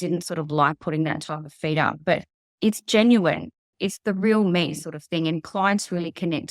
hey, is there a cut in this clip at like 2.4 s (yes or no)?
yes